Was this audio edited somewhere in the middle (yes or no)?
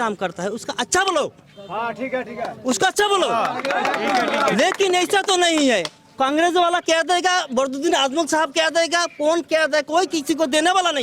no